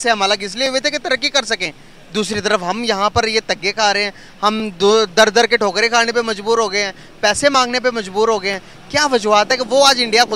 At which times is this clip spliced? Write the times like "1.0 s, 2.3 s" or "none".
none

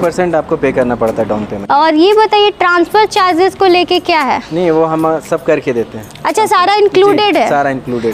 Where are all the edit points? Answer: none

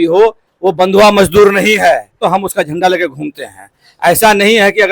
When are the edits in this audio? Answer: 2.2 s

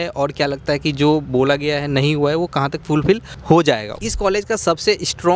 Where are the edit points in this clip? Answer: 3.9 s

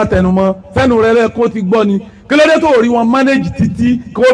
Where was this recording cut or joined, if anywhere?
none

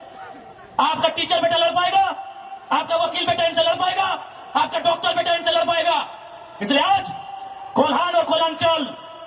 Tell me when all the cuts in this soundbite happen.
none

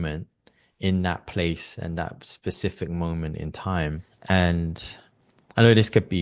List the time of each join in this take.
4.1 s

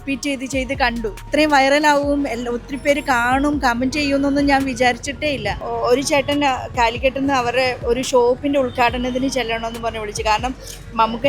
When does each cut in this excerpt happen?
1.2 s, 5.6 s

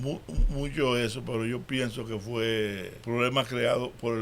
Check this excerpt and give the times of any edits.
2.9 s

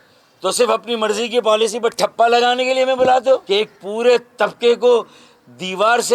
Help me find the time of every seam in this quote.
3.4 s

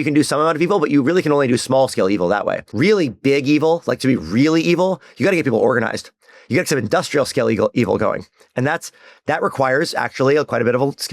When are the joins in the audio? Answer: 2.6 s

